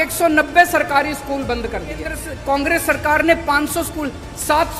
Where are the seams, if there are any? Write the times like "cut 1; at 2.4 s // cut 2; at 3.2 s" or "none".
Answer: cut 1; at 2.3 s

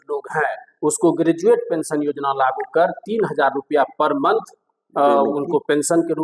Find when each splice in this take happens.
none

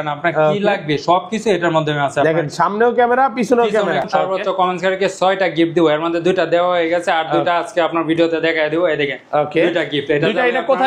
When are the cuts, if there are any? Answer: cut 1; at 4.1 s

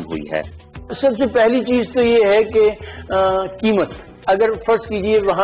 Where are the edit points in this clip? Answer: cut 1; at 0.9 s // cut 2; at 4.1 s

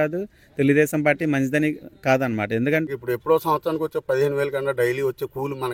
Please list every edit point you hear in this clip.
cut 1; at 2.9 s

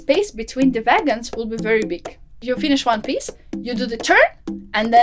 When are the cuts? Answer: cut 1; at 2.3 s

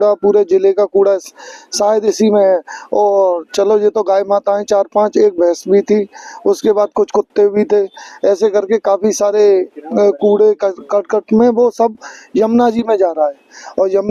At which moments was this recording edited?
none

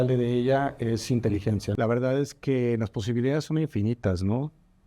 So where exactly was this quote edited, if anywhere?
cut 1; at 1.7 s

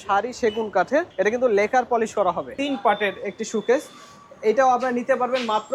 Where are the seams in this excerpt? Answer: cut 1; at 1.1 s // cut 2; at 2.6 s

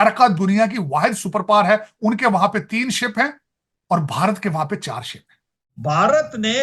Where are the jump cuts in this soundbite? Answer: cut 1; at 5.7 s

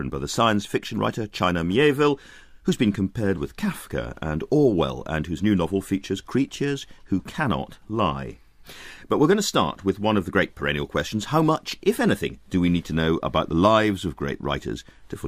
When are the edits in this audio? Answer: none

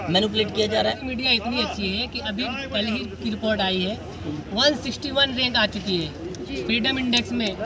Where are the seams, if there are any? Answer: cut 1; at 1.0 s

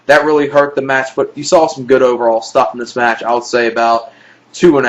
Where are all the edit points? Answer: cut 1; at 3.5 s

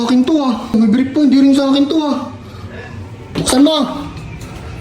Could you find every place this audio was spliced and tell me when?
cut 1; at 0.7 s // cut 2; at 3.3 s

